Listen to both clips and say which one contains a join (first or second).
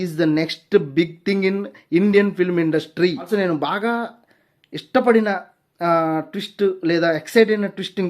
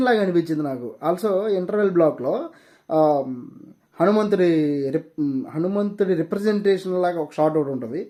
first